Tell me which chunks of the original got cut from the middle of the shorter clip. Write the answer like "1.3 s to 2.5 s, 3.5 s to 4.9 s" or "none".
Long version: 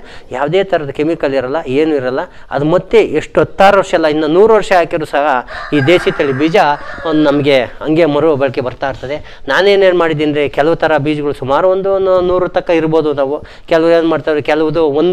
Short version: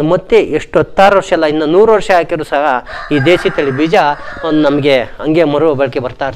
none

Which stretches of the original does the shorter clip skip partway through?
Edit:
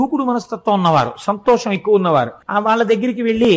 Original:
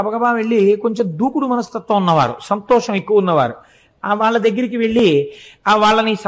3.6 s to 3.9 s

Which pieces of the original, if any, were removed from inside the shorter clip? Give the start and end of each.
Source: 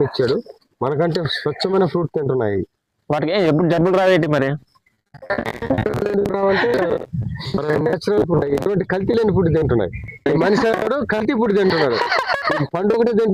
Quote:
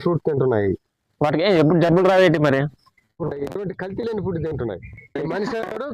5.1 s to 8.3 s

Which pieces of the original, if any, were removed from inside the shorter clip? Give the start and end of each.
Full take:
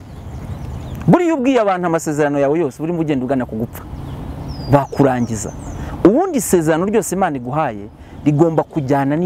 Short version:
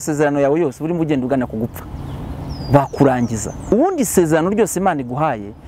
5.7 s to 6.1 s

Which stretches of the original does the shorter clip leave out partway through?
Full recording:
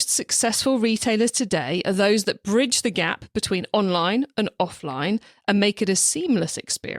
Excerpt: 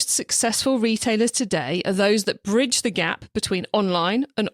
none

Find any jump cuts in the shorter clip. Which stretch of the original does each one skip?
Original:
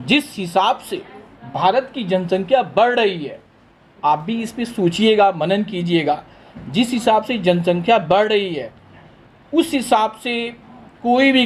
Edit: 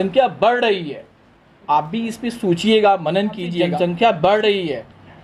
6.0 s to 7.5 s

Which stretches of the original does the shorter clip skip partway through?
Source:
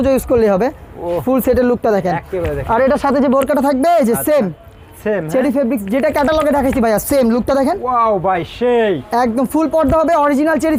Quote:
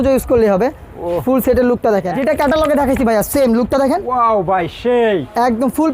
2.1 s to 5.9 s

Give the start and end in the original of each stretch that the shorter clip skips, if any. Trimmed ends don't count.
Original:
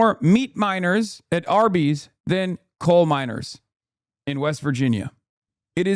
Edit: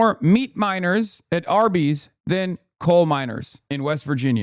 3.5 s to 4.1 s

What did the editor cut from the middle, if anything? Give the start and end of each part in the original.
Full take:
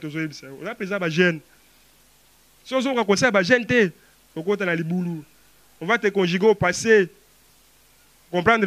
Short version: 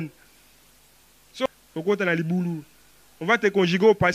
2.7 s to 4.0 s

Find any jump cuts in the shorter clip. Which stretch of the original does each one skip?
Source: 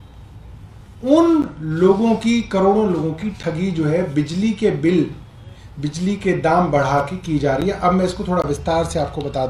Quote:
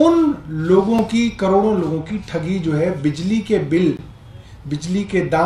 none

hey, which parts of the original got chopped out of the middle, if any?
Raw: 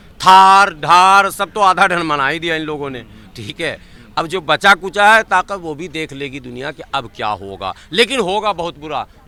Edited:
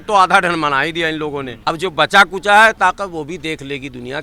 3.0 s to 4.0 s

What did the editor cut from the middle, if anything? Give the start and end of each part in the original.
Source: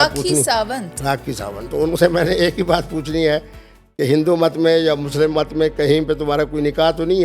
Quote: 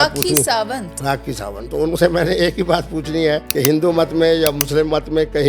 3.5 s to 3.9 s

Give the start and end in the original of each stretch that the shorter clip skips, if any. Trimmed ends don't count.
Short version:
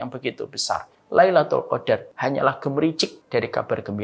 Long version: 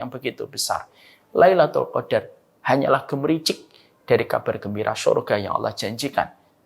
1.0 s to 1.2 s, 2.3 s to 2.6 s, 3.6 s to 3.9 s

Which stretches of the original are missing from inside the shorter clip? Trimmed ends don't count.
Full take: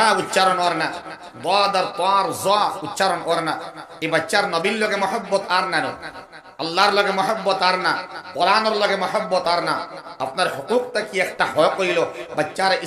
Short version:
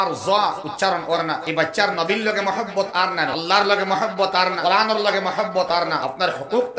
3.6 s to 4.0 s, 5.9 s to 6.6 s, 7.8 s to 8.3 s, 9.8 s to 10.2 s

